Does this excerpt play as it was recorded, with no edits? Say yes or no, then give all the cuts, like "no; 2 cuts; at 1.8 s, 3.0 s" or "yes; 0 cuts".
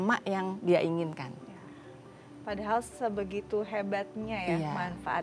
yes; 0 cuts